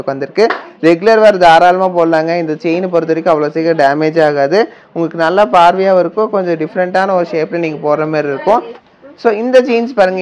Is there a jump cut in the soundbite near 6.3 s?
no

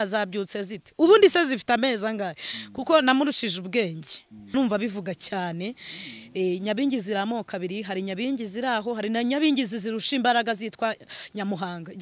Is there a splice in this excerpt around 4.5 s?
yes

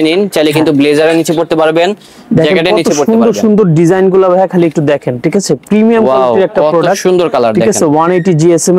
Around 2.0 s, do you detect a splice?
no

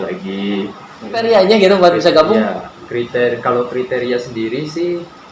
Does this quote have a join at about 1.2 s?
yes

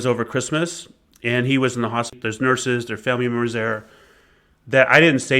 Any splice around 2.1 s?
yes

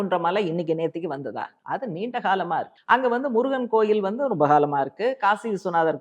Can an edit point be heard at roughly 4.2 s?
no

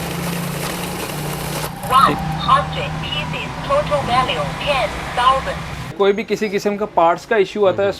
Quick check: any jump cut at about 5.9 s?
yes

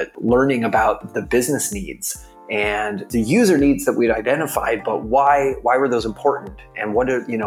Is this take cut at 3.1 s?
yes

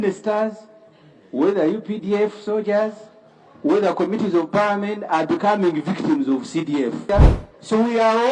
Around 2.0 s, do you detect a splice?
no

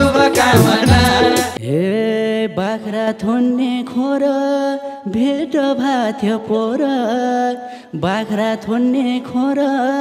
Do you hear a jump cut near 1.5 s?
yes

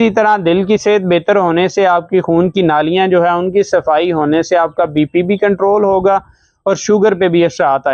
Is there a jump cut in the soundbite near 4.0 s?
no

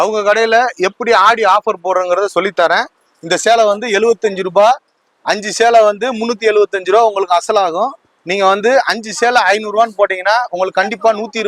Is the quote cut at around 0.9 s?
no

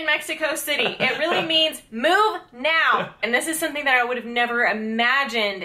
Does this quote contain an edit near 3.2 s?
yes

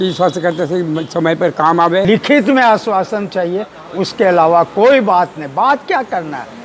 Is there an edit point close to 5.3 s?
no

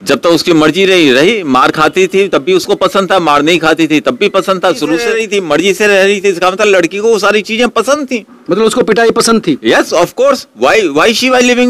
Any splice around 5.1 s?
yes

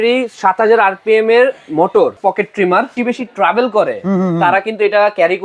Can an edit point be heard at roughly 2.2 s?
yes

